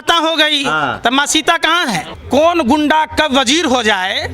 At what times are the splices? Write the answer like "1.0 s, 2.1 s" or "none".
2.1 s